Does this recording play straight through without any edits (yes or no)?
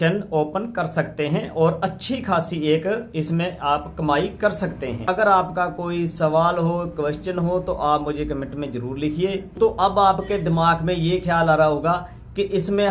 no